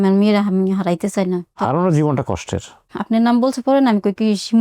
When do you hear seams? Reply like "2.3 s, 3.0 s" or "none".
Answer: 1.6 s, 2.8 s